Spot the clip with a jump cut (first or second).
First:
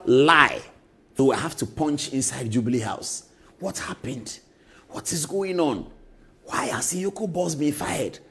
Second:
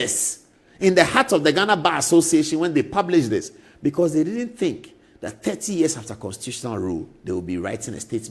first